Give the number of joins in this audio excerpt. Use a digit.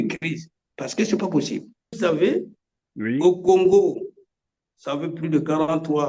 1